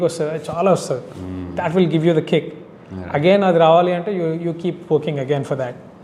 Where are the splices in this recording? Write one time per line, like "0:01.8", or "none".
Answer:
none